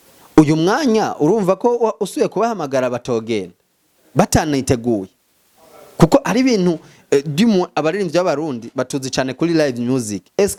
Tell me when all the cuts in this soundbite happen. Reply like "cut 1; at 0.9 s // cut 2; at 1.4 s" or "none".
none